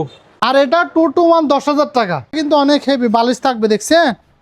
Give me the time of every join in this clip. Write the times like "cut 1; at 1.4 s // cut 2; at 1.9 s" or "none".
cut 1; at 2.3 s